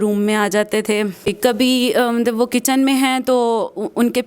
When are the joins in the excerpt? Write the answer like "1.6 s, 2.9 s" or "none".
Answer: 1.3 s

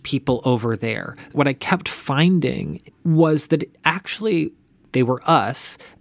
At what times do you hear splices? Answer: 1.3 s, 2.7 s, 4.7 s

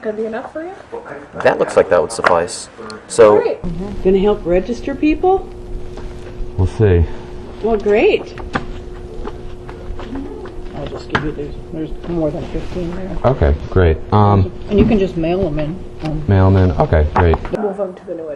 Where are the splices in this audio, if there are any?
none

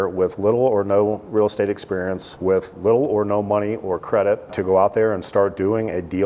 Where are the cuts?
2.2 s, 4.6 s

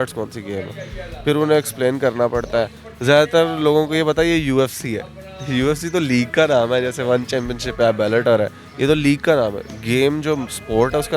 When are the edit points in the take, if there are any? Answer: none

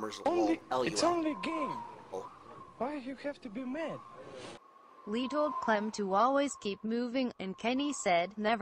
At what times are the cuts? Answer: none

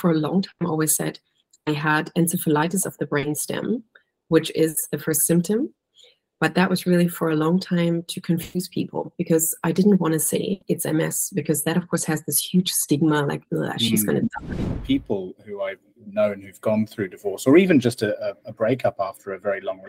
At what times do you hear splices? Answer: 14.7 s

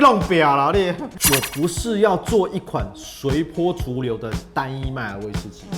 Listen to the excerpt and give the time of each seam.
1.0 s

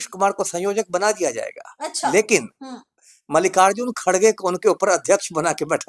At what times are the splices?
none

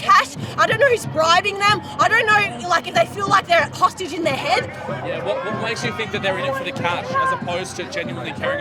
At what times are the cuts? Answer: none

